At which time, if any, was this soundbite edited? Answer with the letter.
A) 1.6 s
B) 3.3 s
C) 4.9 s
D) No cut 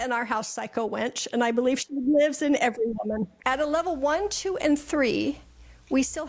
B